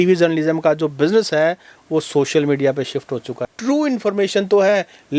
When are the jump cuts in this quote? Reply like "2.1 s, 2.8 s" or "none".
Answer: 3.4 s